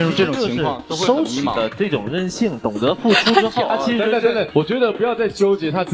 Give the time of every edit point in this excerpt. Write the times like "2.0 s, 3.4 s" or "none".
3.7 s